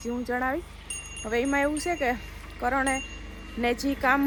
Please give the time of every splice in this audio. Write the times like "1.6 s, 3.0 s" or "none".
none